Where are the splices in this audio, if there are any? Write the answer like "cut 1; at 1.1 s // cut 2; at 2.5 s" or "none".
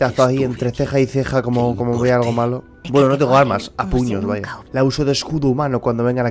cut 1; at 2.7 s // cut 2; at 4.6 s

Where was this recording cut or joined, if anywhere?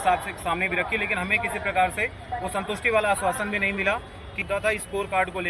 cut 1; at 4.4 s

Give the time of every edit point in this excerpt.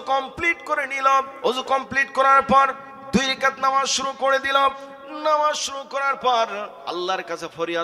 cut 1; at 1.3 s // cut 2; at 6.8 s

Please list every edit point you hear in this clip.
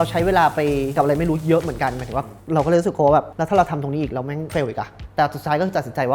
cut 1; at 1.0 s // cut 2; at 3.3 s // cut 3; at 4.5 s

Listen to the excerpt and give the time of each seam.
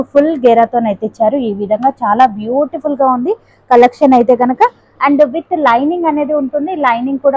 none

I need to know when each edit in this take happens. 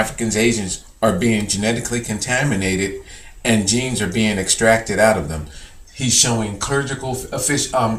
cut 1; at 6.6 s

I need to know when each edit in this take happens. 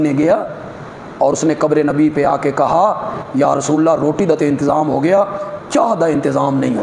none

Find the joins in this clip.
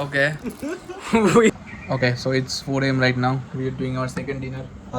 cut 1; at 1.6 s

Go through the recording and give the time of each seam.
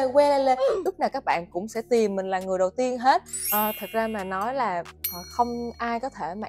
cut 1; at 3.4 s

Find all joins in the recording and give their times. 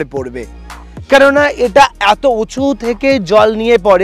none

